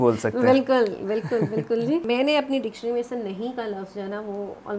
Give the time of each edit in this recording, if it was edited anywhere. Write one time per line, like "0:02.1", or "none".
0:02.0